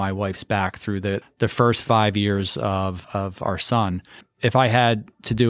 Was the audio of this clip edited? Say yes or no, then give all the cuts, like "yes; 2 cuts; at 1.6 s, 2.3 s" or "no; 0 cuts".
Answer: yes; 3 cuts; at 1.2 s, 3.0 s, 4.2 s